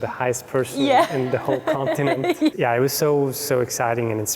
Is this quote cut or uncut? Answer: cut